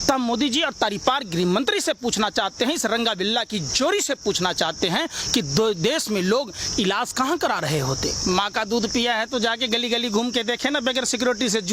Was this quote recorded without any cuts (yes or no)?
no